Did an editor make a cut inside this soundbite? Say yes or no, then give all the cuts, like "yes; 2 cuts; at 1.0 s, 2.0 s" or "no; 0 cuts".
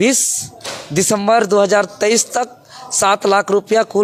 no; 0 cuts